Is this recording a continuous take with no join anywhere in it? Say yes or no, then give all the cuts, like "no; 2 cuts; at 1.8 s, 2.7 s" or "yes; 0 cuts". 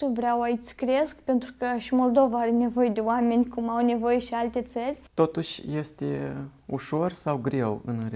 no; 1 cut; at 5.0 s